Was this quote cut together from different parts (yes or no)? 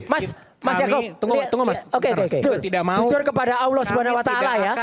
yes